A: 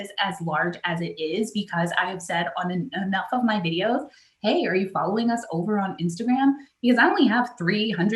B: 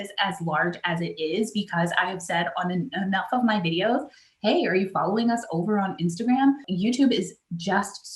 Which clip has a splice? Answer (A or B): B